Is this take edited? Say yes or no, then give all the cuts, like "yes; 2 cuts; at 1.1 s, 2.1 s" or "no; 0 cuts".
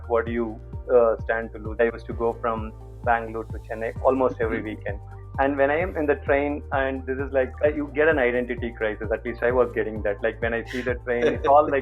yes; 2 cuts; at 1.8 s, 7.6 s